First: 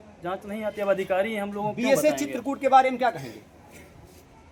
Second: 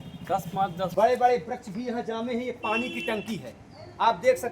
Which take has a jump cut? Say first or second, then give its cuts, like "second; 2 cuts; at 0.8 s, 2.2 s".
second; 1 cut; at 0.9 s